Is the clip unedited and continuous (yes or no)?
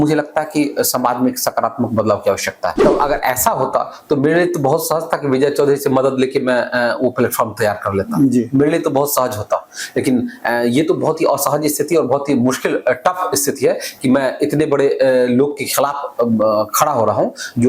no